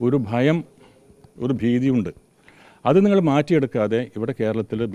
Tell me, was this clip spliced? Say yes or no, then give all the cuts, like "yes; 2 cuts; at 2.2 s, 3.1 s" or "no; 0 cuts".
no; 0 cuts